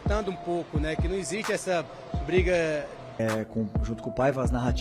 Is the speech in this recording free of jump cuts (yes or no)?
no